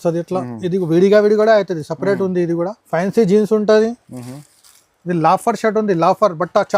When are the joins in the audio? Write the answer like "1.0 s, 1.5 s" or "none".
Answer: 2.8 s

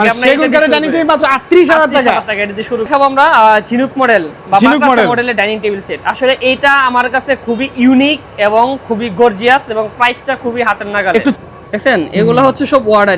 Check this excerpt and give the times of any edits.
2.9 s, 11.4 s

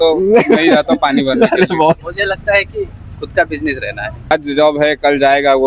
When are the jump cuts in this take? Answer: 2.1 s, 4.3 s

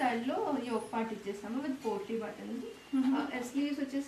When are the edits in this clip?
none

